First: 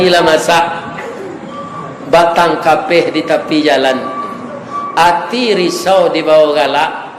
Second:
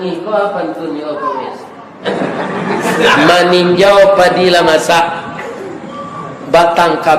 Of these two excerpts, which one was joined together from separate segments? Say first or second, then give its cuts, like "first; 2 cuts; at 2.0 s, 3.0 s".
second; 1 cut; at 2.1 s